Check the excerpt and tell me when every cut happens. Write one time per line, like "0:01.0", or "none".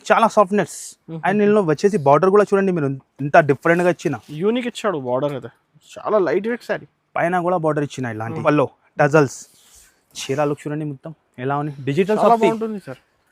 0:08.4